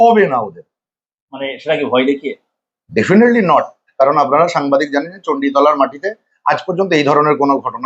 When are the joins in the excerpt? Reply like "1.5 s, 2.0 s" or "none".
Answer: none